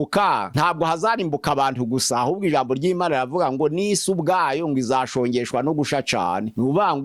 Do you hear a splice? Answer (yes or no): no